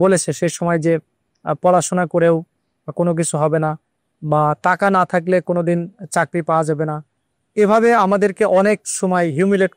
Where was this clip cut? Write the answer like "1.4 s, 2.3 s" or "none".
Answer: none